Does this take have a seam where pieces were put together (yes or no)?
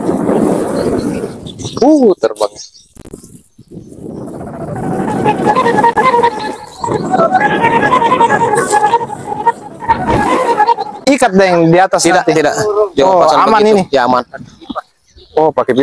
yes